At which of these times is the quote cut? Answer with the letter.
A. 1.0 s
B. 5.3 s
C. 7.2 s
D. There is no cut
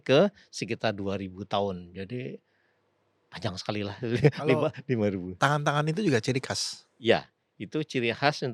B